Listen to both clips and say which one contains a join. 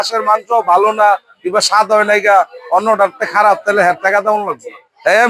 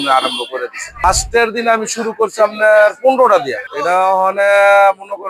second; 2 cuts; at 1.0 s, 3.7 s

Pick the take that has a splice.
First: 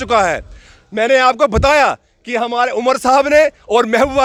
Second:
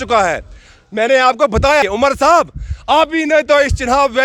second; 1 cut; at 1.8 s

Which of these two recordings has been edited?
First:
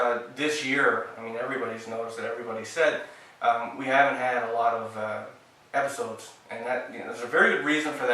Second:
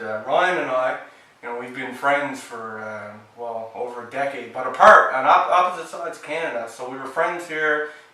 first; 1 cut; at 3.9 s

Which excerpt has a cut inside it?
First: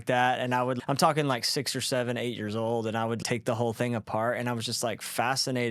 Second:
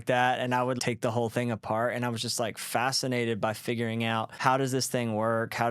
second; 2 cuts; at 0.8 s, 4.3 s

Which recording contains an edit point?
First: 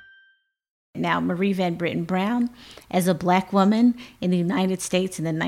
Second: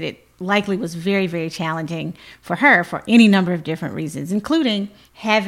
first; 1 cut; at 0.9 s

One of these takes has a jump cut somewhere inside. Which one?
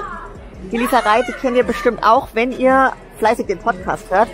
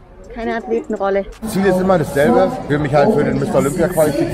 second; 2 cuts; at 1.5 s, 2.6 s

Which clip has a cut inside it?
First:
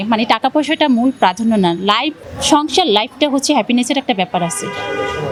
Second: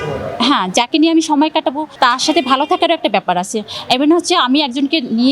second; 1 cut; at 1.9 s

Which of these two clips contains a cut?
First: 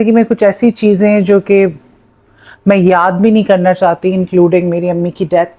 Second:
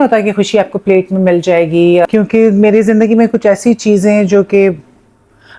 second; 1 cut; at 2.1 s

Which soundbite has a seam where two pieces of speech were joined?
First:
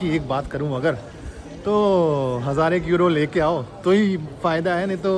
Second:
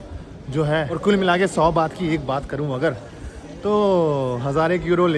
second; 1 cut; at 0.9 s

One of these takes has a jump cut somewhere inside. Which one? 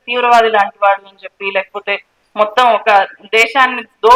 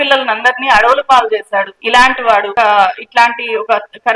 second; 2 cuts; at 1.8 s, 2.5 s

